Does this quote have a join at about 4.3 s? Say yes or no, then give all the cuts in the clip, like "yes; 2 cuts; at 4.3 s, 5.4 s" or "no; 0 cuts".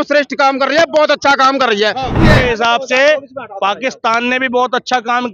no; 1 cut; at 2.1 s